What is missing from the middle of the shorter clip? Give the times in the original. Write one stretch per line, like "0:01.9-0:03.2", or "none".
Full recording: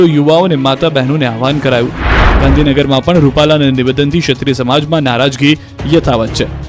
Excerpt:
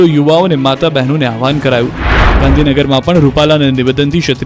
none